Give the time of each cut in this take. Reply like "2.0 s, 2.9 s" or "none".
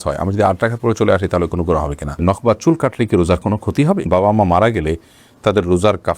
2.2 s, 4.1 s